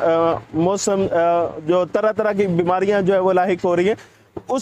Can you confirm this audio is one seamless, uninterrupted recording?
yes; 0 cuts

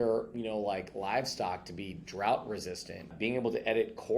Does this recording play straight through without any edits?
no; 1 cut; at 3.1 s

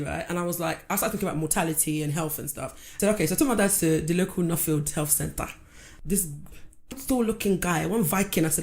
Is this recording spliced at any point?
yes; 2 cuts; at 2.8 s, 5.8 s

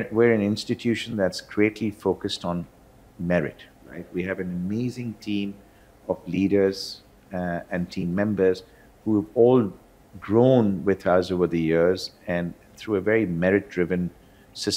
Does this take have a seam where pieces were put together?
no; 0 cuts

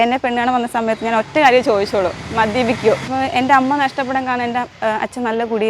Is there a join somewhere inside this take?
yes; 2 cuts; at 3.1 s, 4.7 s

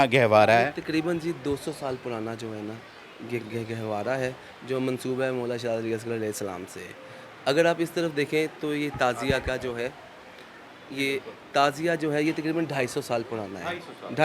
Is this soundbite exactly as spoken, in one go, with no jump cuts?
yes; 0 cuts

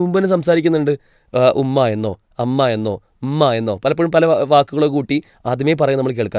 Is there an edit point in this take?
no; 0 cuts

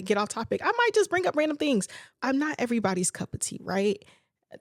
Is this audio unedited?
no; 1 cut; at 2.1 s

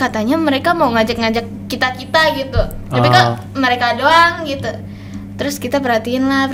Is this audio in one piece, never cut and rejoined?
yes; 0 cuts

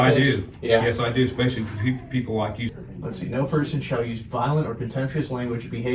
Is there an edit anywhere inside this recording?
yes; 1 cut; at 2.7 s

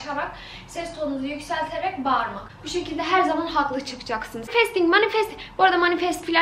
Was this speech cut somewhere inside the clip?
yes; 1 cut; at 4.5 s

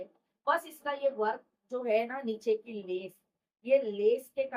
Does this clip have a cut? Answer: no; 0 cuts

